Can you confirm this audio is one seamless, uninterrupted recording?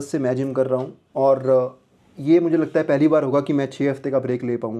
yes; 0 cuts

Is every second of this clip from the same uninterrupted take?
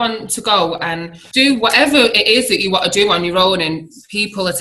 no; 1 cut; at 1.2 s

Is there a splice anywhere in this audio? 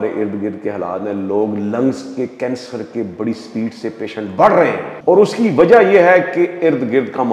yes; 1 cut; at 4.9 s

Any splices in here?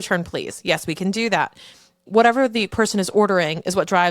yes; 1 cut; at 2.0 s

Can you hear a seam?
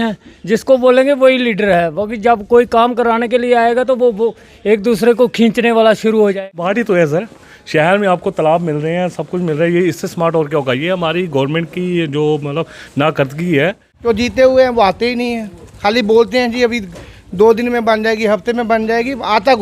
yes; 2 cuts; at 6.4 s, 13.9 s

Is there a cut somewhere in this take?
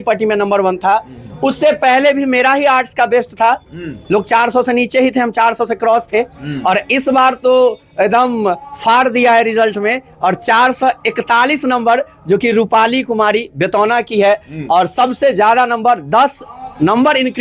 no; 0 cuts

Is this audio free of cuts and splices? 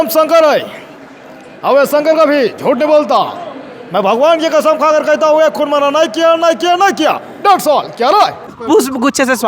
no; 1 cut; at 8.5 s

